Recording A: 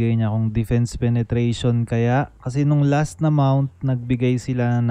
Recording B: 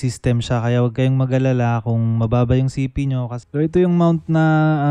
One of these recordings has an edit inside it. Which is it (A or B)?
B